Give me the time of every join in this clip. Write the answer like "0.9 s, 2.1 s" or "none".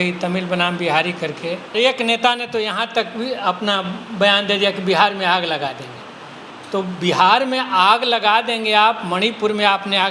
1.7 s